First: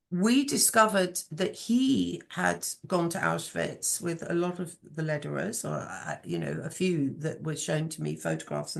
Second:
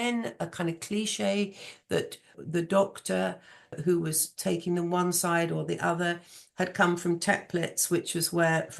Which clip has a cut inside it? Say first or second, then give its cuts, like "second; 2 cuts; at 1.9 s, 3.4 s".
second; 2 cuts; at 2.4 s, 3.8 s